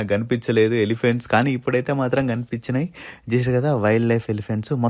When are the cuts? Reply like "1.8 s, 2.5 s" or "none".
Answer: none